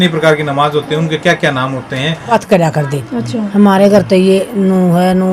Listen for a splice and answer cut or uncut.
cut